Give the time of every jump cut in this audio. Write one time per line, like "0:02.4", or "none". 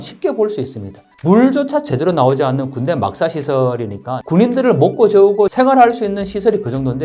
0:04.1
0:05.5